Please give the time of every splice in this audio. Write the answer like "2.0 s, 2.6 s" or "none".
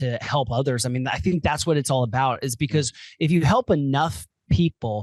none